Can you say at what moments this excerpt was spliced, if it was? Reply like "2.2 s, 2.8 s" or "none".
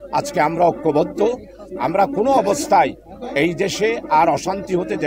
none